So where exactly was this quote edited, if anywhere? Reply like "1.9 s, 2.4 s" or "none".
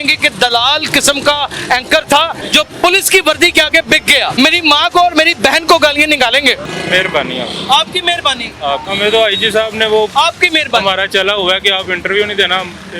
2.4 s, 4.3 s, 6.7 s, 8.9 s

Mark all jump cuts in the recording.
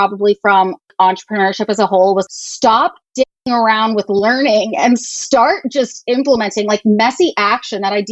0.9 s, 2.3 s

